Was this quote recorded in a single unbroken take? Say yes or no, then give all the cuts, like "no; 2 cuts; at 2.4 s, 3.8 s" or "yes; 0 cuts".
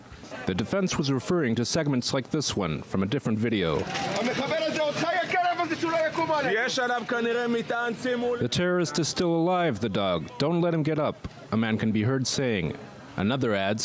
no; 1 cut; at 4.7 s